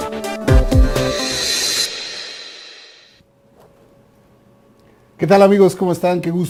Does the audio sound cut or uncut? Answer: uncut